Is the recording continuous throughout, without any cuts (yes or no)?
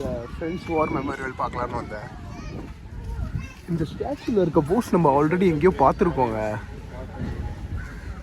no